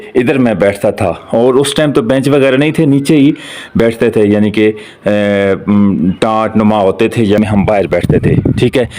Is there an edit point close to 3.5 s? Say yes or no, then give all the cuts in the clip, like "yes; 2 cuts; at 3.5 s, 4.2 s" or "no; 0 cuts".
no; 1 cut; at 7.4 s